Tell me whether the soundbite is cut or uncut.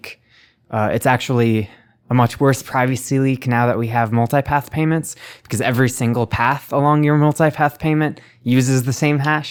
uncut